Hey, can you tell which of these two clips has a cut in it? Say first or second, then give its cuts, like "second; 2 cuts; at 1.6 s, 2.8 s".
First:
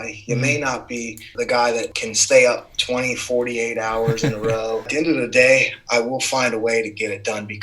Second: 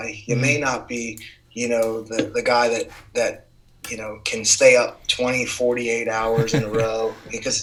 first; 3 cuts; at 1.3 s, 2.0 s, 4.9 s